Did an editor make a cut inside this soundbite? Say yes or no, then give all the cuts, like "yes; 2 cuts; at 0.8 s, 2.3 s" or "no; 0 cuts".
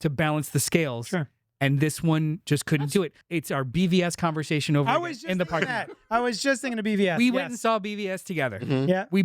yes; 1 cut; at 3.2 s